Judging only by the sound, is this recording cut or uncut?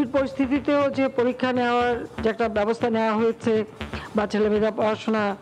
uncut